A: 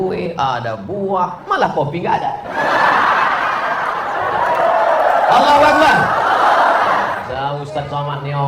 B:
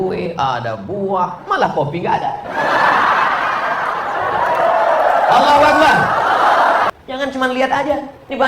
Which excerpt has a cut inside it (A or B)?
B